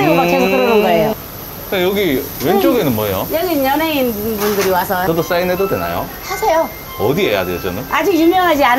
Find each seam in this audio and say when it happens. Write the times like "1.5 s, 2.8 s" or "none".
1.1 s, 5.0 s